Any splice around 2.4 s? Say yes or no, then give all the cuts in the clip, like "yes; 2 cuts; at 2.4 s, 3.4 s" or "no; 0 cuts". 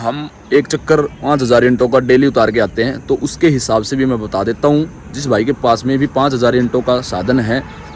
no; 0 cuts